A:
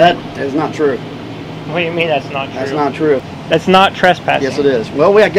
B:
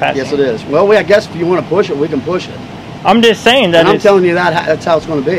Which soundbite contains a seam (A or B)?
A